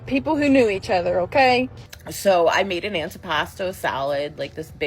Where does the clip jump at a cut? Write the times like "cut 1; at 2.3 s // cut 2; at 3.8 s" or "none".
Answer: cut 1; at 1.8 s